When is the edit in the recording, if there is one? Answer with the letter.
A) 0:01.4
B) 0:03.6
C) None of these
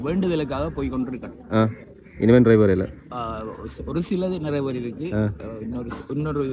C